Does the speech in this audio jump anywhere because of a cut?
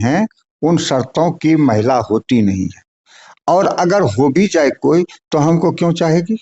no; 0 cuts

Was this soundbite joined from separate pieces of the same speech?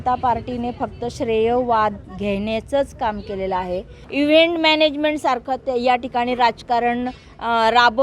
yes; 2 cuts; at 2.1 s, 4.0 s

